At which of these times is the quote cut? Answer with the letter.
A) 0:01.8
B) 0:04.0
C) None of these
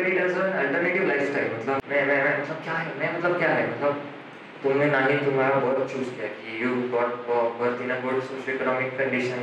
A